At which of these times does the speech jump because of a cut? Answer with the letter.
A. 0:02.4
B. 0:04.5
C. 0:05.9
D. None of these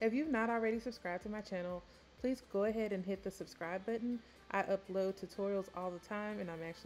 A